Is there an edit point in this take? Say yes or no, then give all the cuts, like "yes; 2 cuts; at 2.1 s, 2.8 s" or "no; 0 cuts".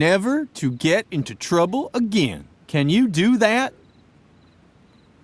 yes; 1 cut; at 4.2 s